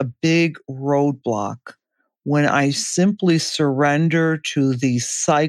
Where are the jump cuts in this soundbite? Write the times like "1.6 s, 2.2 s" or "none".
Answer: none